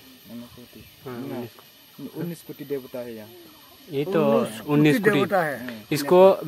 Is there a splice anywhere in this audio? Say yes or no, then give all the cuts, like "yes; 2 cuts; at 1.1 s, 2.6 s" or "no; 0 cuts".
no; 0 cuts